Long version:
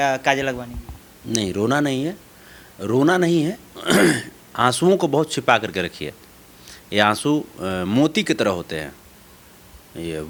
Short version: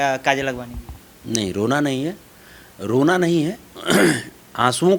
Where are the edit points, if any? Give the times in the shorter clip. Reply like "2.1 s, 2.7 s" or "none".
none